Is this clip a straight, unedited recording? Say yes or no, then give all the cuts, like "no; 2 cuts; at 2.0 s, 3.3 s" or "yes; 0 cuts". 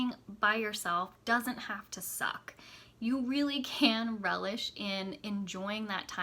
yes; 0 cuts